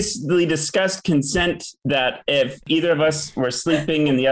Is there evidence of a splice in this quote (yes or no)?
no